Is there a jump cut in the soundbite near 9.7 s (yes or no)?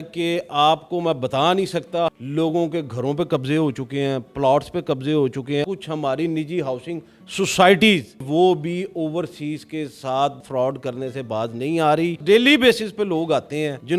no